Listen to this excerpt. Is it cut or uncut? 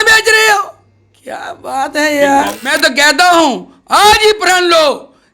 cut